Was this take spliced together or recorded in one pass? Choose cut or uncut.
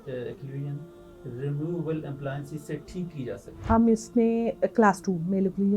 cut